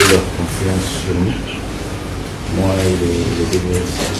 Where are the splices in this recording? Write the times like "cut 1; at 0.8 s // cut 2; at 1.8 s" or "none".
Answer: none